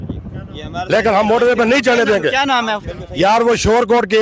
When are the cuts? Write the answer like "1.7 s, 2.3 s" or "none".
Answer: none